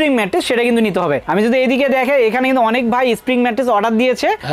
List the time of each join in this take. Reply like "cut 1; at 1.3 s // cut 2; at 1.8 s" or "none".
none